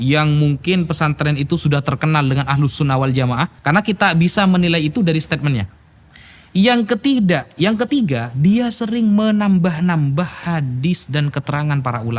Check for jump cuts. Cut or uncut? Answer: uncut